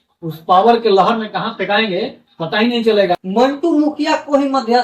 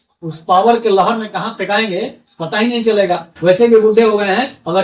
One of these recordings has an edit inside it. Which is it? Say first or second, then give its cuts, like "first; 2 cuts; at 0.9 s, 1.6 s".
first; 1 cut; at 3.2 s